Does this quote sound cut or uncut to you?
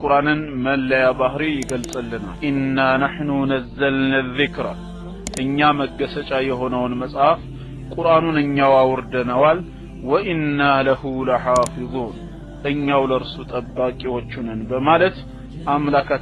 cut